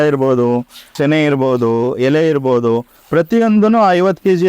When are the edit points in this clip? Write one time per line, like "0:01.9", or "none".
0:00.9